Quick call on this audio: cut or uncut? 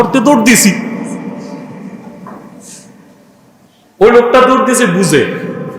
uncut